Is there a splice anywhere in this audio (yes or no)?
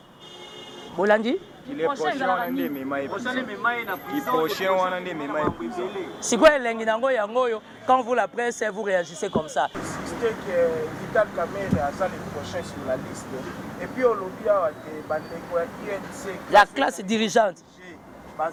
no